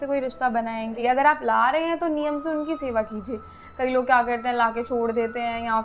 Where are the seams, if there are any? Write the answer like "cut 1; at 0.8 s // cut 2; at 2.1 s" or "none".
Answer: cut 1; at 1.0 s